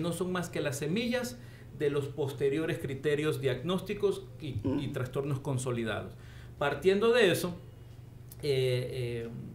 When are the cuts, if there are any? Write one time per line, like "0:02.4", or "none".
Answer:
none